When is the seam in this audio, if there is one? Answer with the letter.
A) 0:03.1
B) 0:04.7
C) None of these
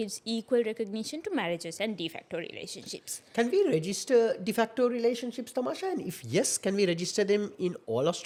C